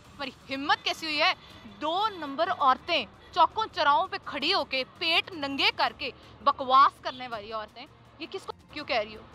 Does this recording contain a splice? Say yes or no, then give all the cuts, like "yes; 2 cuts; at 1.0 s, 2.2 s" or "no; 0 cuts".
no; 0 cuts